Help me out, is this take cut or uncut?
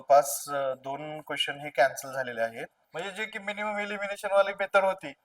cut